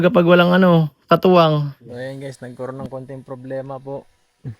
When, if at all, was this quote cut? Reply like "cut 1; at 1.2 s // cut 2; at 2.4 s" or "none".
cut 1; at 1.8 s